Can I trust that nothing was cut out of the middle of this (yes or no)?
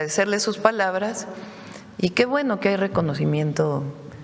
yes